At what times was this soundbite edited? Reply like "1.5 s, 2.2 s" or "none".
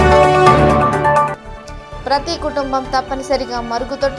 1.3 s